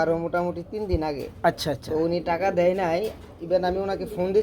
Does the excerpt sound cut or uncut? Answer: uncut